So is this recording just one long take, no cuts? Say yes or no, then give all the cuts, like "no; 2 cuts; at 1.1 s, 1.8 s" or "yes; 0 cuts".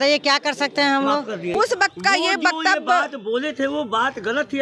no; 1 cut; at 1.5 s